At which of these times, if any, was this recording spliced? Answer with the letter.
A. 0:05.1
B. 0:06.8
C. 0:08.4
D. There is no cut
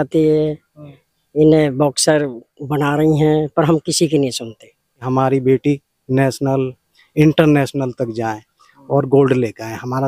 A